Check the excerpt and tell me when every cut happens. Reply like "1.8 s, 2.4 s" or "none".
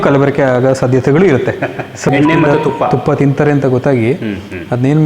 2.1 s

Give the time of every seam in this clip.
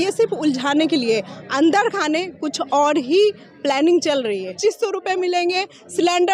4.5 s

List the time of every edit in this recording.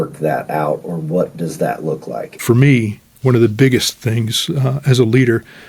2.3 s

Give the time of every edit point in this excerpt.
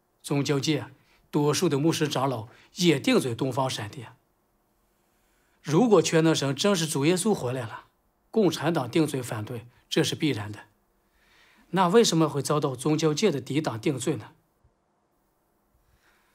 none

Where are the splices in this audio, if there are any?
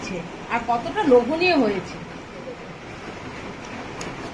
2.7 s

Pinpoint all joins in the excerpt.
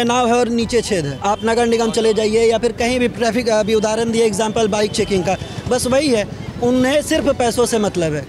1.1 s

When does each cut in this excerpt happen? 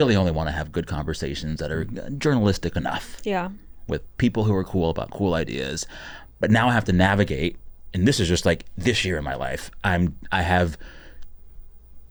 none

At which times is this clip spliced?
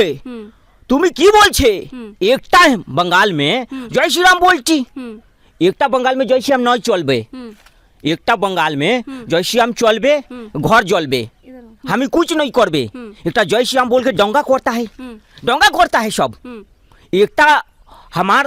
none

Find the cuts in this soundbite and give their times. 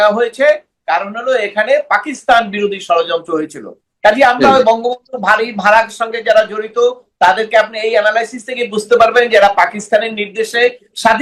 none

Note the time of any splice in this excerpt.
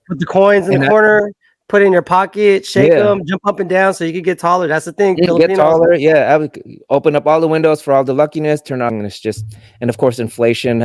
8.9 s

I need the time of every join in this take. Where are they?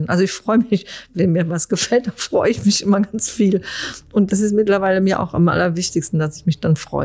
1.0 s, 4.3 s

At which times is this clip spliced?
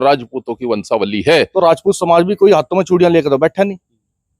1.5 s

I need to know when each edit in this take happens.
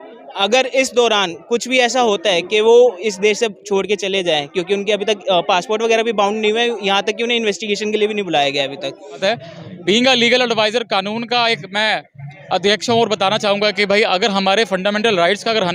9.2 s

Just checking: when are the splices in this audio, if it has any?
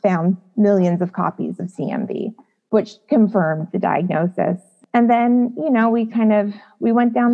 4.7 s

